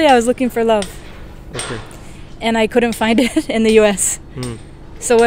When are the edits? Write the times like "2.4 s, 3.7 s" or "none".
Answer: none